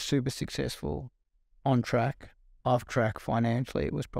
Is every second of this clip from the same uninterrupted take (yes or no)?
yes